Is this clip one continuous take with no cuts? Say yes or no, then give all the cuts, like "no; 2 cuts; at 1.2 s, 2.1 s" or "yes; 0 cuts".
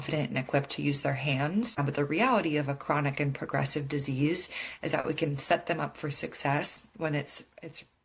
yes; 0 cuts